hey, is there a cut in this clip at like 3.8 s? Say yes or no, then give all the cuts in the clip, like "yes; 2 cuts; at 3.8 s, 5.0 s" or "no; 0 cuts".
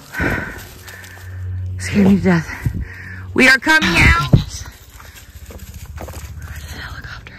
yes; 1 cut; at 3.8 s